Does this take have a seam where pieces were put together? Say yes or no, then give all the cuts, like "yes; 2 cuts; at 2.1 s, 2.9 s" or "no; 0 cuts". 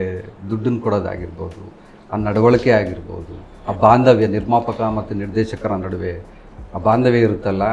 no; 0 cuts